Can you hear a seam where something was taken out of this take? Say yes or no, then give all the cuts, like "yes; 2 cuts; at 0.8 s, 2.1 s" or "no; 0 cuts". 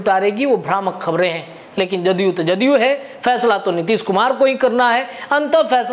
no; 0 cuts